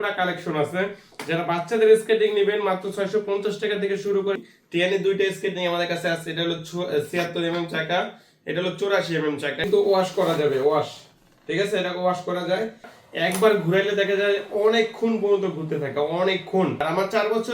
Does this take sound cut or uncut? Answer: cut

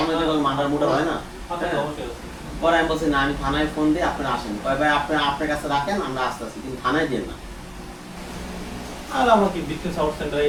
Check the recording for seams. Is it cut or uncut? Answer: uncut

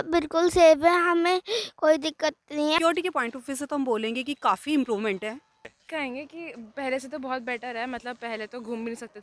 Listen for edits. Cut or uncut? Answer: cut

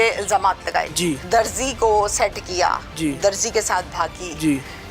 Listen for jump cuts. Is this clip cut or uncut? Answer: cut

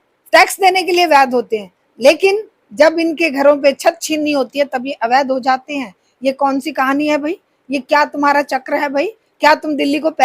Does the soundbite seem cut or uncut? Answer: uncut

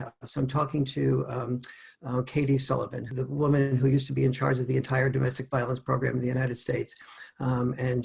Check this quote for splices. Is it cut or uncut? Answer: cut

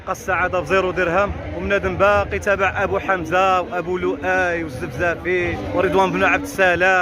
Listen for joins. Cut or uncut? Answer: cut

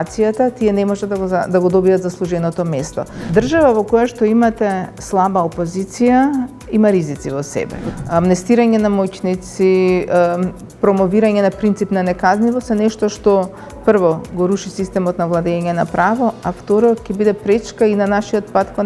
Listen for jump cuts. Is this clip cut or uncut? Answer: cut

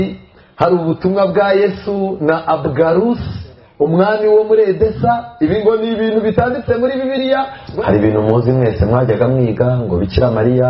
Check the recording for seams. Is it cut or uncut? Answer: cut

